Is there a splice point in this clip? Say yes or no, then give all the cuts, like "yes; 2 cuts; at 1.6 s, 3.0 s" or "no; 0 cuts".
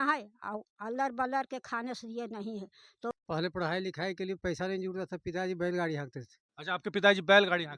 yes; 1 cut; at 3.1 s